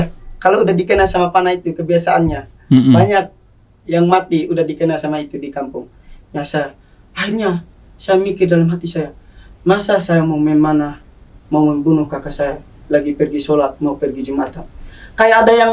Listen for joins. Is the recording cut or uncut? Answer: uncut